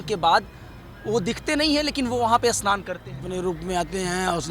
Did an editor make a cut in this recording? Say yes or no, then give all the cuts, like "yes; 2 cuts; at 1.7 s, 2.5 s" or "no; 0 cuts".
yes; 1 cut; at 3.2 s